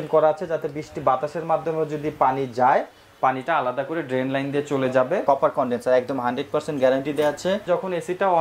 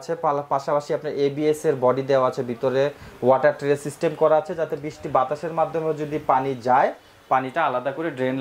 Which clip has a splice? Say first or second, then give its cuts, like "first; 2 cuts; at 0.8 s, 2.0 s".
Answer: first; 2 cuts; at 5.2 s, 7.6 s